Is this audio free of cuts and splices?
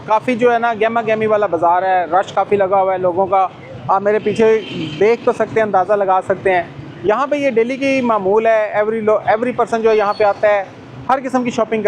yes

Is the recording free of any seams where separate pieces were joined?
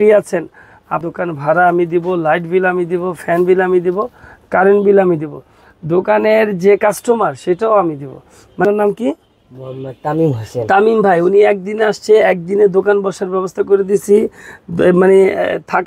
no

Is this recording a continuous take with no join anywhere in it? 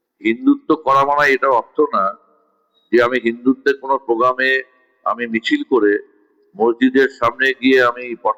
yes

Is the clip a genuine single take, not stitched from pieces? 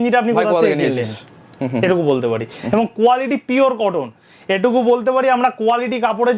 yes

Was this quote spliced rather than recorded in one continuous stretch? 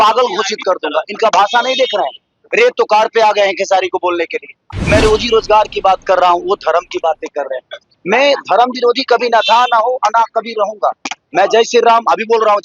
yes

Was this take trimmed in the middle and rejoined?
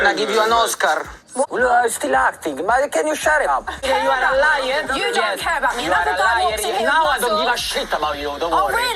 yes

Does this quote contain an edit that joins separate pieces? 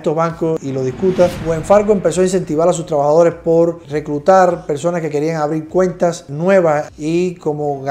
yes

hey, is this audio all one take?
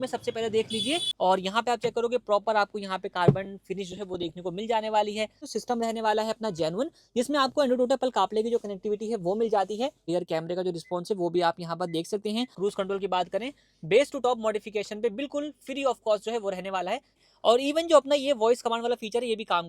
no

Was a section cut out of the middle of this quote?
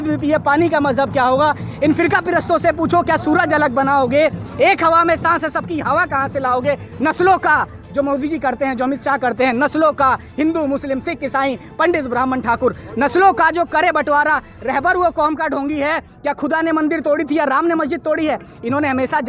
no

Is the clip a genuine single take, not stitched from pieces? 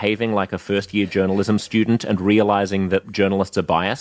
no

